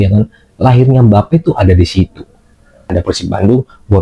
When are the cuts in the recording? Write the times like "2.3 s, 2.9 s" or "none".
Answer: 2.9 s